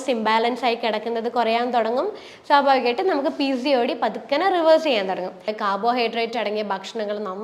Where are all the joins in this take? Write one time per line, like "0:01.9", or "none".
0:05.5

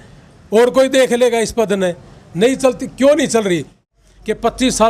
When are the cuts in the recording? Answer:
0:03.9

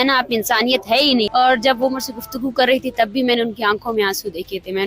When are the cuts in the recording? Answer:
0:01.3

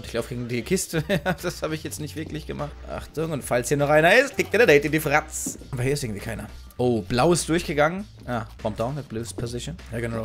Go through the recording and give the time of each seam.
none

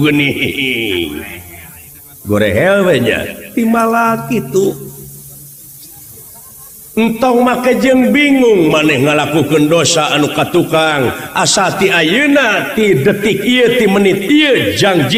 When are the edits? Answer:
none

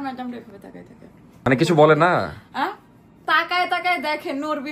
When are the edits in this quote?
0:01.5

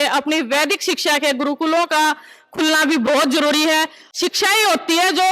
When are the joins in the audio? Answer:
0:04.0

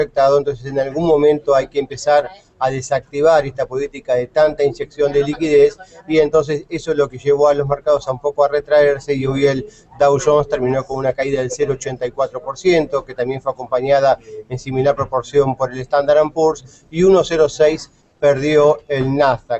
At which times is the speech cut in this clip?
0:04.0

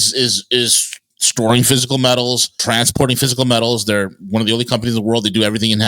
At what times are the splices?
0:02.6

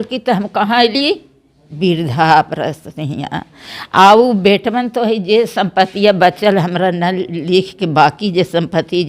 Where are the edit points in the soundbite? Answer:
none

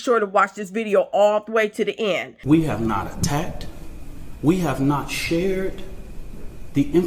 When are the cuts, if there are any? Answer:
0:02.3

